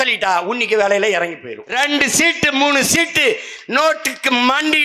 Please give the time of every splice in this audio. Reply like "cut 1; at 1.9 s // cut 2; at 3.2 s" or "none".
cut 1; at 1.7 s

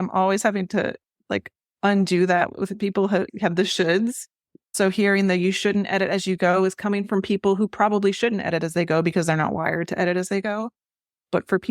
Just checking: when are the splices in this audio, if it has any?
cut 1; at 3.3 s

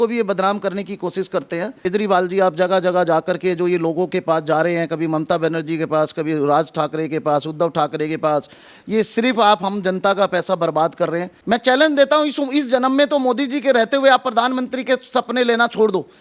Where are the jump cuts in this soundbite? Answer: cut 1; at 1.8 s // cut 2; at 11.3 s

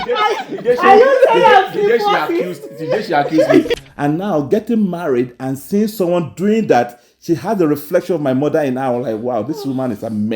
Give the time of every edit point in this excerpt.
cut 1; at 3.7 s

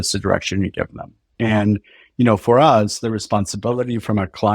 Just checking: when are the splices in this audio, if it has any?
cut 1; at 1.3 s

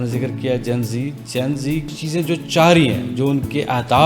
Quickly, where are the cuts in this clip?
cut 1; at 1.9 s

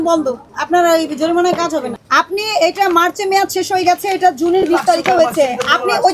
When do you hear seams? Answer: cut 1; at 1.9 s

